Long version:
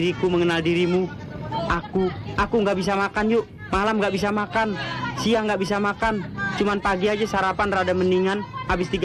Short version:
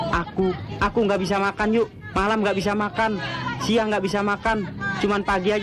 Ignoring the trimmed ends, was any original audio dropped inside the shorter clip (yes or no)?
no